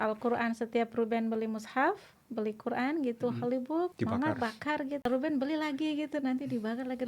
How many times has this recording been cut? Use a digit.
2